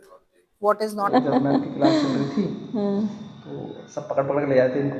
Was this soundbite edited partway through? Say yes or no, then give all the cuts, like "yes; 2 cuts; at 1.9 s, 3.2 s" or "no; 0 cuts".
yes; 1 cut; at 1.1 s